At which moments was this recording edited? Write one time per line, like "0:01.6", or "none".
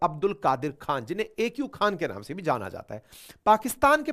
none